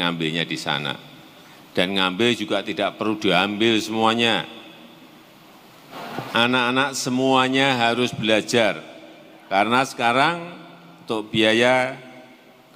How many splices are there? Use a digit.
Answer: 1